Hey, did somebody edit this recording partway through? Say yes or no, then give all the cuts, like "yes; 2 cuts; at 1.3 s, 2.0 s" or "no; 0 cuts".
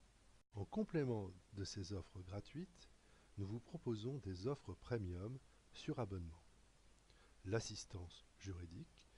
no; 0 cuts